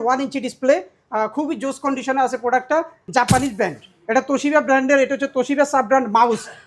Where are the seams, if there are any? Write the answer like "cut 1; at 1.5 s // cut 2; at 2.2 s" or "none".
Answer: cut 1; at 3.0 s